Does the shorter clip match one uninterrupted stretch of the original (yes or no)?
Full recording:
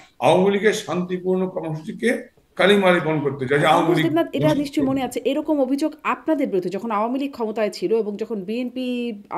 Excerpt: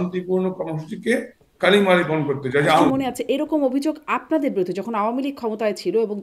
no